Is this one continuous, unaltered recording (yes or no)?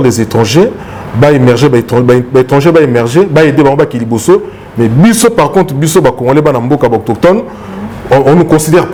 yes